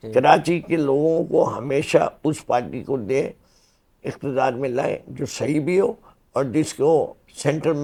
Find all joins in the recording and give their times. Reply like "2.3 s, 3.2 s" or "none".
none